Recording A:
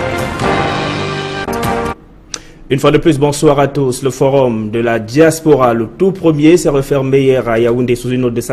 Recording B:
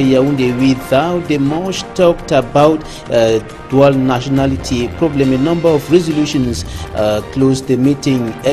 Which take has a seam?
A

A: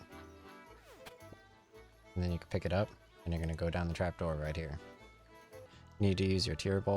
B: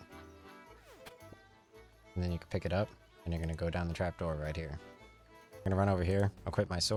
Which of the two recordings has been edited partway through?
A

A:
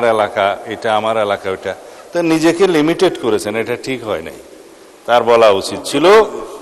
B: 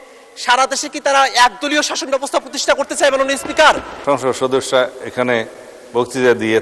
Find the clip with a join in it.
B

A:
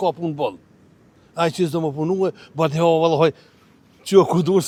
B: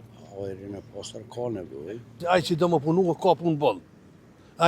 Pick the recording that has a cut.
B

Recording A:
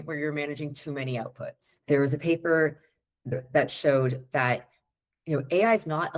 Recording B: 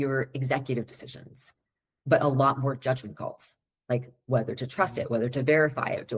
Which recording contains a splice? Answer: A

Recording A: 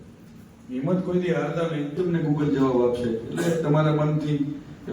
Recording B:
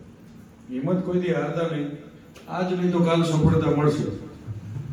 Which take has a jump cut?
A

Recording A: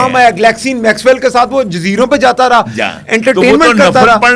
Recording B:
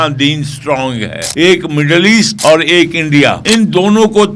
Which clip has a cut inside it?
B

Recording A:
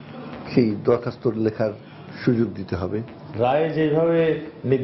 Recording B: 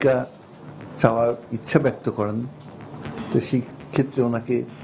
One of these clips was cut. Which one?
A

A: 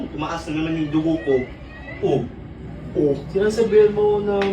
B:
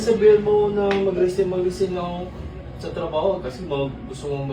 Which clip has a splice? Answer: A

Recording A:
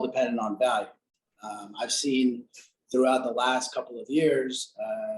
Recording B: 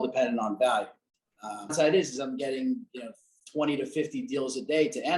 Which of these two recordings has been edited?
B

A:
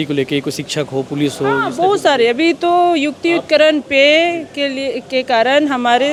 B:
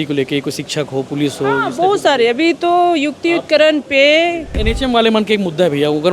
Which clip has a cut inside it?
B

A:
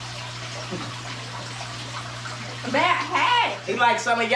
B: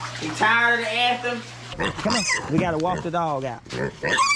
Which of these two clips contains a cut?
B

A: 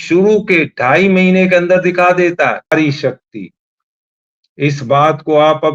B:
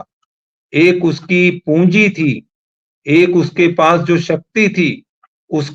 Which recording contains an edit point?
A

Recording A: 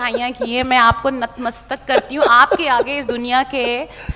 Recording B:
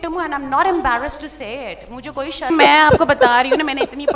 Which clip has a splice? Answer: B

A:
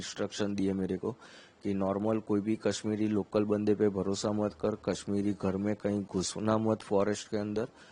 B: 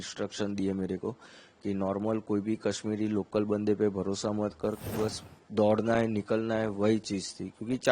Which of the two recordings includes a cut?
B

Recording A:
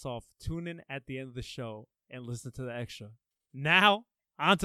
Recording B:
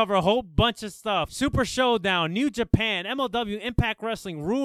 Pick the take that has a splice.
B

